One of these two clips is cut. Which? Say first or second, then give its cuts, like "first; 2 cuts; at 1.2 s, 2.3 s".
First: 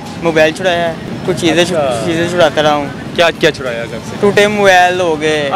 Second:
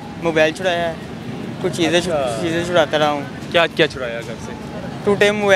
first; 2 cuts; at 1.1 s, 4.0 s